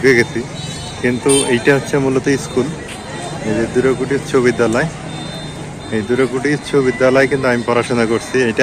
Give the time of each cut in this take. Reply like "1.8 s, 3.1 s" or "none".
none